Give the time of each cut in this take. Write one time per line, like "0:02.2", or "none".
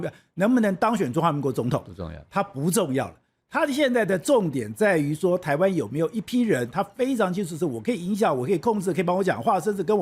none